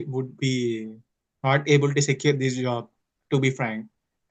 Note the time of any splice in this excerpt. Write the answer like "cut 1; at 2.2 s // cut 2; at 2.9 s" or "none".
none